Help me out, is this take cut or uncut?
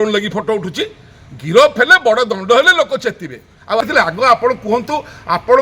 cut